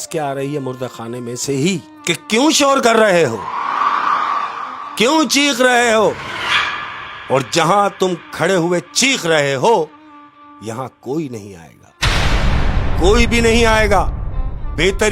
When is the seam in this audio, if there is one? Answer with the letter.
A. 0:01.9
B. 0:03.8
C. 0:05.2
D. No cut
A